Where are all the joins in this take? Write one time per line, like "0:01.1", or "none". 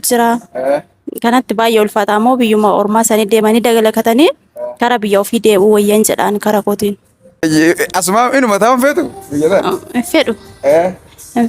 0:07.4